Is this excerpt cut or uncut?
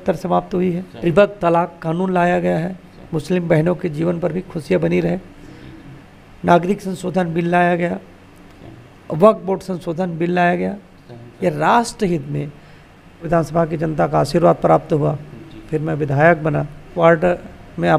cut